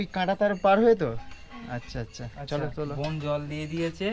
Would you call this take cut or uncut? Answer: uncut